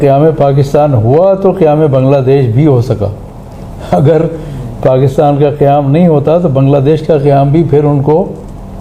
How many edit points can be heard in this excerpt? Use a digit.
0